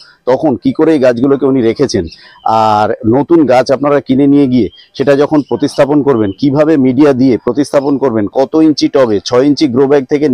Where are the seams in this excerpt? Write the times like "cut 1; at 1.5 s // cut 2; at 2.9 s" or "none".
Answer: none